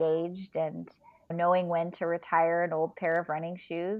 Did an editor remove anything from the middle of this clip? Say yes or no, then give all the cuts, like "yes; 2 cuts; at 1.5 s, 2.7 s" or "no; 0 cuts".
no; 0 cuts